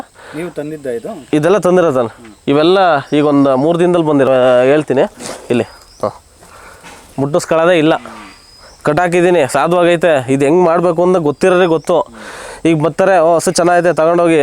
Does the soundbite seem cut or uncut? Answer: cut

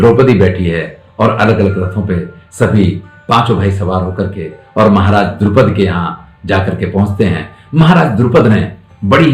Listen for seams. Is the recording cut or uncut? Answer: uncut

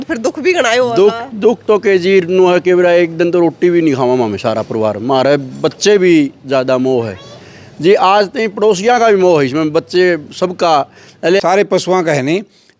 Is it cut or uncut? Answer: cut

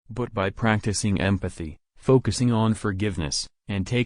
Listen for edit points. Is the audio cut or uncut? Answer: uncut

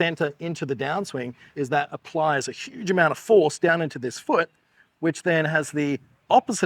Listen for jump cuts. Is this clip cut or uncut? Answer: cut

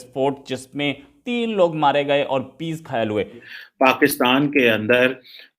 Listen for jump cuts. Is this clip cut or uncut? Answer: cut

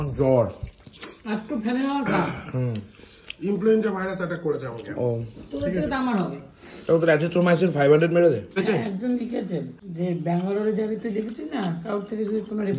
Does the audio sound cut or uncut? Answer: cut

